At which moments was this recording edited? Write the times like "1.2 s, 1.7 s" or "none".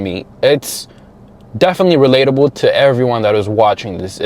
none